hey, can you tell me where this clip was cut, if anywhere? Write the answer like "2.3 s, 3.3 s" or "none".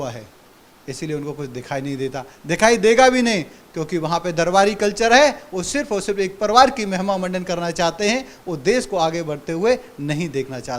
none

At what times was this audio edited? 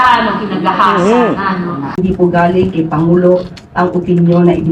2.0 s

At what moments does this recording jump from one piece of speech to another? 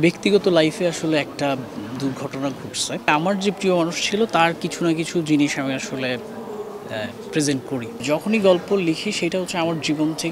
3.1 s, 8.0 s

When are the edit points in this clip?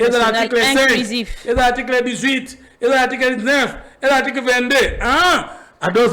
none

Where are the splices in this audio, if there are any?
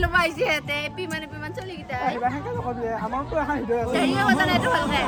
none

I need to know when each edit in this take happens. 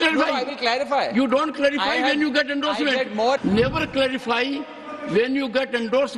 3.4 s

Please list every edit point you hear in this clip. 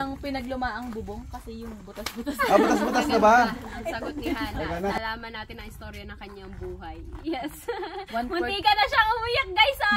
5.0 s

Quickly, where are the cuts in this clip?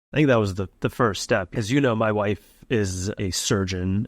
1.5 s

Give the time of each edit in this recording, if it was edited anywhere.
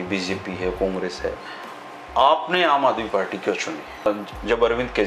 4.1 s

